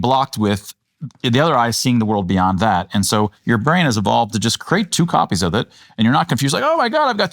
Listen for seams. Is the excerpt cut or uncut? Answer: uncut